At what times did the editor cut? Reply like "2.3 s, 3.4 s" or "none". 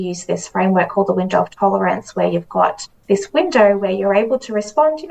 2.9 s